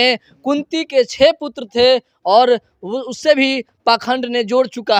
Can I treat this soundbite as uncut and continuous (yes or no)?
yes